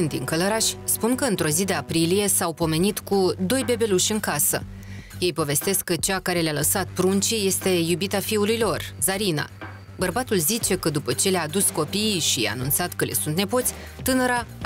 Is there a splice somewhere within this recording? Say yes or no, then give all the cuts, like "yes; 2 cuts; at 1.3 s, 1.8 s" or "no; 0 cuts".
no; 0 cuts